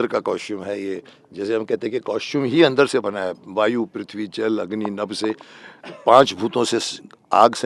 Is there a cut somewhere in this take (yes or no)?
no